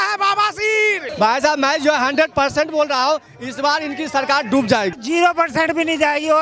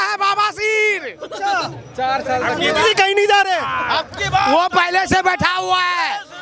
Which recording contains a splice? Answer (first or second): first